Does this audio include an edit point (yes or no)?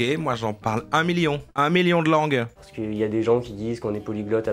yes